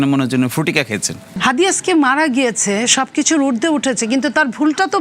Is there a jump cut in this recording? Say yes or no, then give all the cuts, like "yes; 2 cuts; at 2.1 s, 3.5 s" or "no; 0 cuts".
yes; 1 cut; at 1.4 s